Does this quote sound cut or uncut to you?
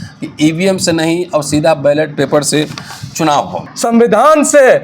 cut